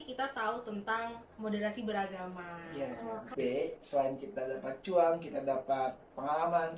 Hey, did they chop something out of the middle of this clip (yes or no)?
yes